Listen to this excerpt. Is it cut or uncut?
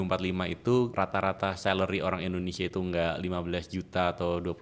cut